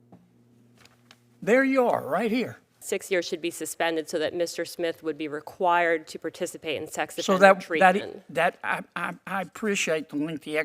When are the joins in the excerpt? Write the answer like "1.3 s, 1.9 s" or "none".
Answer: 2.8 s